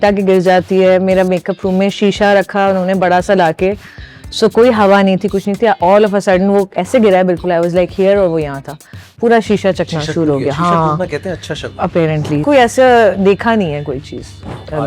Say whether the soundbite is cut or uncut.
cut